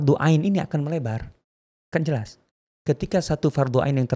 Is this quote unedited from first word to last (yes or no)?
yes